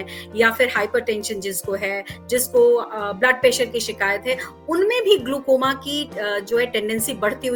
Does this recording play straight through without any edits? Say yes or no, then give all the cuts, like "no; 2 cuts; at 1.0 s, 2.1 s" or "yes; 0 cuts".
yes; 0 cuts